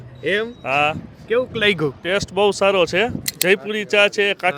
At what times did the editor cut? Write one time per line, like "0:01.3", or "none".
0:03.3